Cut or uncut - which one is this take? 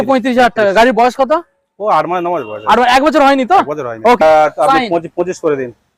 cut